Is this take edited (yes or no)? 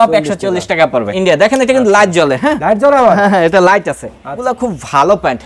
yes